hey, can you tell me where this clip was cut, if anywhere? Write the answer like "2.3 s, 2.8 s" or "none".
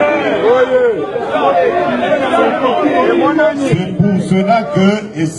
none